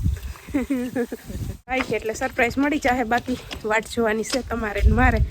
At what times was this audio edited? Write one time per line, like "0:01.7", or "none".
0:01.7